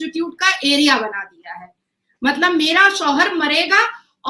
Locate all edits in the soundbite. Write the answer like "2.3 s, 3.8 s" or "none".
none